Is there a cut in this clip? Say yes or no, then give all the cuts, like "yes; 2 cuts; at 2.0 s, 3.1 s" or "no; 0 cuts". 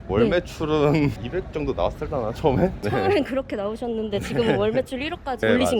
no; 0 cuts